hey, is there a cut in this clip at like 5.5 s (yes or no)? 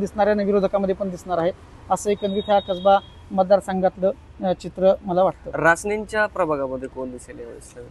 no